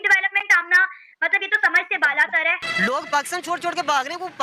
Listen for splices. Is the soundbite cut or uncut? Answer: cut